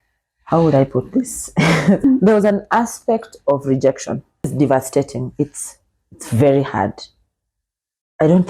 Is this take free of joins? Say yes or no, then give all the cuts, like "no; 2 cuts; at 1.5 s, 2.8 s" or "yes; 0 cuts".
no; 1 cut; at 4.5 s